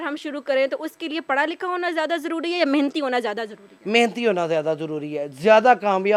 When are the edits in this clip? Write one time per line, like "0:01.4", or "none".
none